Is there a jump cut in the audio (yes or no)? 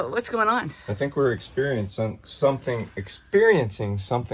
no